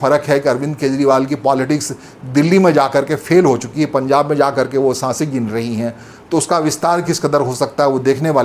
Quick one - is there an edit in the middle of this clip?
no; 0 cuts

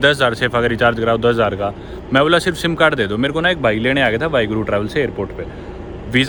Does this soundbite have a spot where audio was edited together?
no; 0 cuts

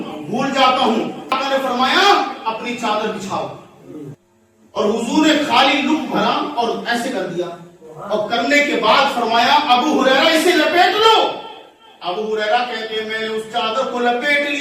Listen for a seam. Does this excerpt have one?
yes; 2 cuts; at 1.4 s, 4.1 s

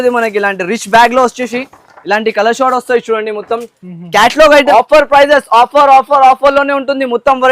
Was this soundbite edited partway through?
yes; 1 cut; at 4.7 s

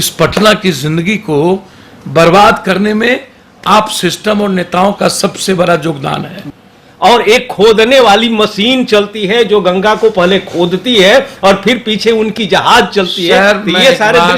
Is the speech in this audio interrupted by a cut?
yes; 1 cut; at 6.4 s

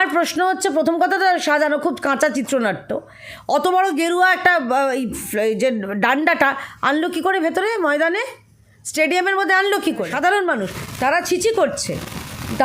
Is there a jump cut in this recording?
yes; 1 cut; at 10.1 s

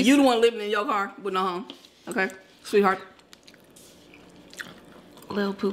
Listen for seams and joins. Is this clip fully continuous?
yes; 0 cuts

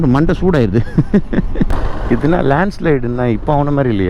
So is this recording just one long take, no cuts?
no; 1 cut; at 1.8 s

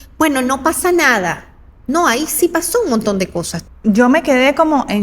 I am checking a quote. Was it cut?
yes; 1 cut; at 3.6 s

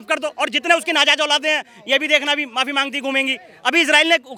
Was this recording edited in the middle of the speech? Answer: no; 0 cuts

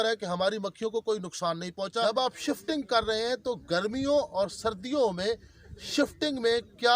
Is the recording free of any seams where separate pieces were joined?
no; 1 cut; at 1.8 s

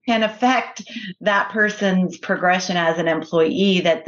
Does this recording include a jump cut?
no; 0 cuts

